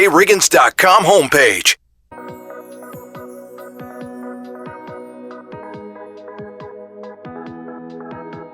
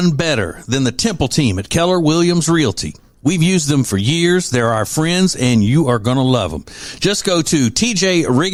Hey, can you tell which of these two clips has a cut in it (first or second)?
first